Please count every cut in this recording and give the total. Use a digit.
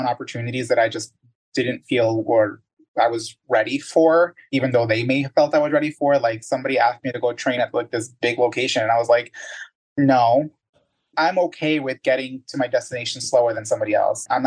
1